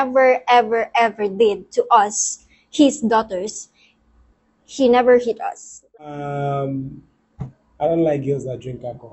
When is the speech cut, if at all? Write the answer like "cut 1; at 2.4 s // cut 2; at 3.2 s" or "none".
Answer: cut 1; at 5.9 s